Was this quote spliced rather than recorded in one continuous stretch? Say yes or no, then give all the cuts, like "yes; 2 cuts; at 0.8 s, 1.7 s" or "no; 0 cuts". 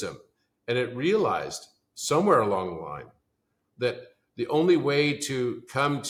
no; 0 cuts